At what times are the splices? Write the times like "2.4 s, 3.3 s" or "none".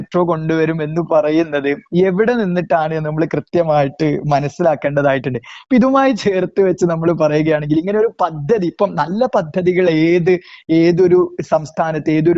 none